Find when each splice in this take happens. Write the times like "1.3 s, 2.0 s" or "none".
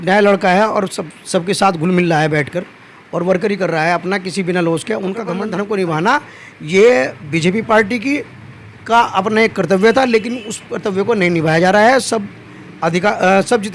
5.4 s